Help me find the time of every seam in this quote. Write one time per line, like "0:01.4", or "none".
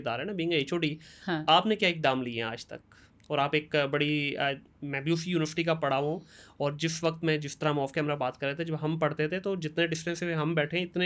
none